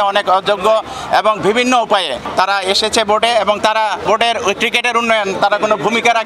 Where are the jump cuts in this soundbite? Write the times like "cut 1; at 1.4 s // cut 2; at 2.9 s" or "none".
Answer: cut 1; at 2.2 s // cut 2; at 4.0 s